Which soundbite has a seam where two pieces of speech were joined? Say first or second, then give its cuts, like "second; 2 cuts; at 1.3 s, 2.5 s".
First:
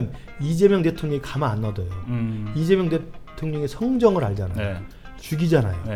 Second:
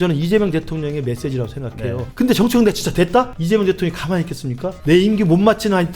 second; 3 cuts; at 2.0 s, 3.4 s, 4.7 s